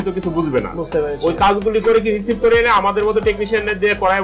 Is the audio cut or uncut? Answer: uncut